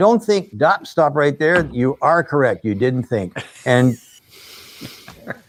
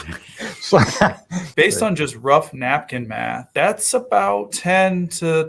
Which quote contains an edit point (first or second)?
second